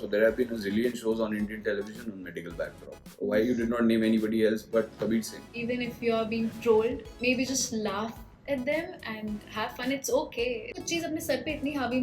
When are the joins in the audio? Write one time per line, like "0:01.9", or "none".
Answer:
0:05.5
0:07.1
0:10.7